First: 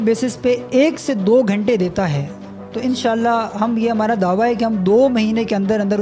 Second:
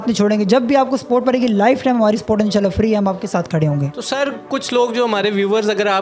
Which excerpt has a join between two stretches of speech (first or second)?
second